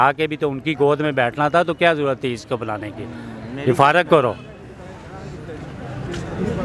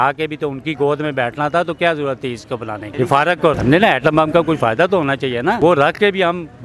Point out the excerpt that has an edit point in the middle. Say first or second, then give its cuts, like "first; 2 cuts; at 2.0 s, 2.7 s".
second; 3 cuts; at 2.8 s, 3.5 s, 5.6 s